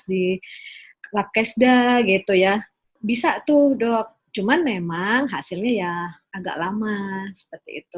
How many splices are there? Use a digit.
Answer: 1